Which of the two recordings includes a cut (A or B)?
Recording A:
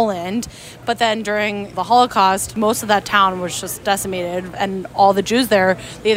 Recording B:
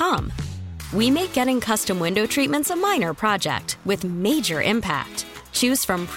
A